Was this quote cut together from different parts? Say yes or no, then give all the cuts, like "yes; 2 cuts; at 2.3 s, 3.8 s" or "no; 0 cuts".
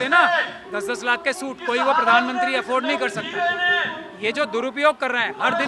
no; 0 cuts